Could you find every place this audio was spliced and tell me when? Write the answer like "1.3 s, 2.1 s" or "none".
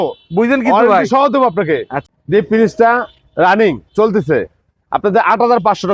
1.9 s